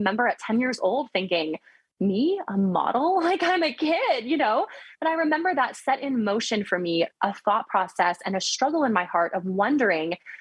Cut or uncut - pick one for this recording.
uncut